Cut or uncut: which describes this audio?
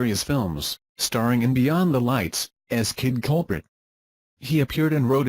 cut